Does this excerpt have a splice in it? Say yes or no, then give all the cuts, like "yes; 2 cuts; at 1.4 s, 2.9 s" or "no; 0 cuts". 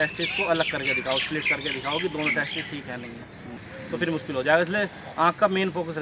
yes; 1 cut; at 3.6 s